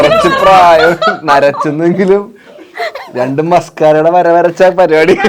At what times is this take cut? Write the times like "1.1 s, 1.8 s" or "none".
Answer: none